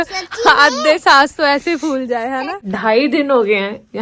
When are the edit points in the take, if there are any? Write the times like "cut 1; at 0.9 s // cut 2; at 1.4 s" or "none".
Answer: cut 1; at 2.7 s